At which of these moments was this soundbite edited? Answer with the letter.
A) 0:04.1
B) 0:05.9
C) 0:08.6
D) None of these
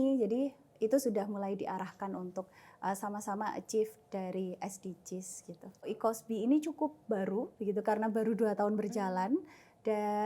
B